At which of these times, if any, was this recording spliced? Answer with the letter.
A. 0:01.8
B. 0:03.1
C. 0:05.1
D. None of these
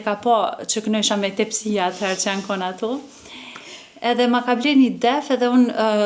D